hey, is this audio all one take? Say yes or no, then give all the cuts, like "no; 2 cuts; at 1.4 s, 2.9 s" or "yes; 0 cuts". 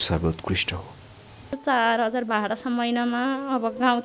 no; 1 cut; at 1.6 s